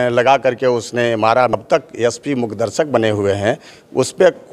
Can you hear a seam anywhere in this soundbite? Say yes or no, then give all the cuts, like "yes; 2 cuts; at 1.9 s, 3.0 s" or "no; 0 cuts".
yes; 1 cut; at 1.5 s